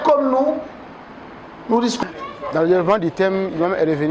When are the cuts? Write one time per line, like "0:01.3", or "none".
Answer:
0:02.0